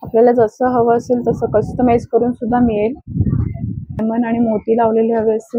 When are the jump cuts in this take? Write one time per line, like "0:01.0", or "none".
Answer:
0:04.0